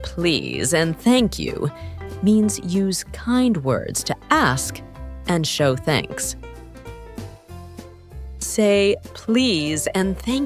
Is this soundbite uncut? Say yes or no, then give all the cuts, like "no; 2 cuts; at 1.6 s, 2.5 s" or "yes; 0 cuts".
yes; 0 cuts